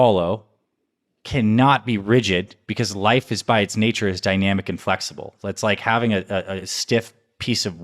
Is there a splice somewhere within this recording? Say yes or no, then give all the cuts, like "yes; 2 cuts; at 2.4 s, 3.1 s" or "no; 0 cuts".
no; 0 cuts